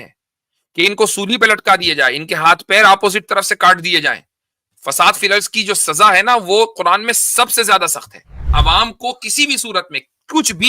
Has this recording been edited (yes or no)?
yes